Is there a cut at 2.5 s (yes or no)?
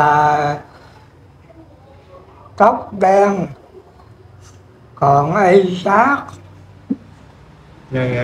no